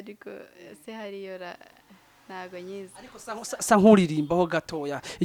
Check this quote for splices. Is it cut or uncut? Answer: uncut